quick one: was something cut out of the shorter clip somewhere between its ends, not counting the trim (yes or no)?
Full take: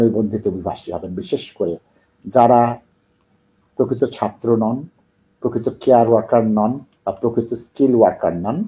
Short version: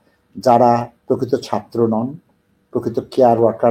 yes